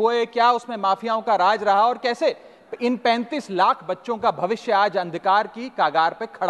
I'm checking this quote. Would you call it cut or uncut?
uncut